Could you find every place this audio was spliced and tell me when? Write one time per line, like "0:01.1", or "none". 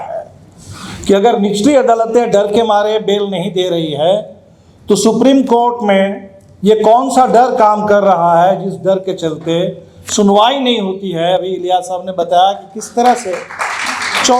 none